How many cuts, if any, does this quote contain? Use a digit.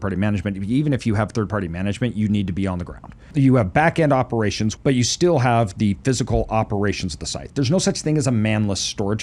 2